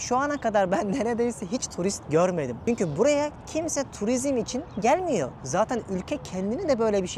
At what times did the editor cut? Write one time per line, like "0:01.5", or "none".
none